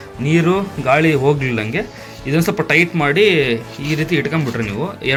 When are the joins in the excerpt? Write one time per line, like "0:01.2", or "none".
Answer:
none